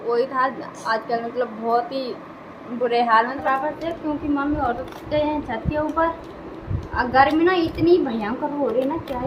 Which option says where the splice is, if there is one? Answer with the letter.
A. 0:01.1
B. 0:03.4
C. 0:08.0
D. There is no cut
B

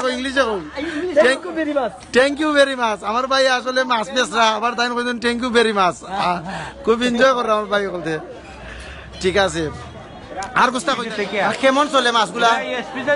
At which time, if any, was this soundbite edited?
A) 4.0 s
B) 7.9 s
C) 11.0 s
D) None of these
C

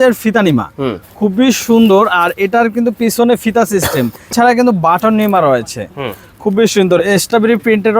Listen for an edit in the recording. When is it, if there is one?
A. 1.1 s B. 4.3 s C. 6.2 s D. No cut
B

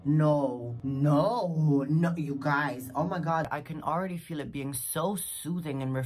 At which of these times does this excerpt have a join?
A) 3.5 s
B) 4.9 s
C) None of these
A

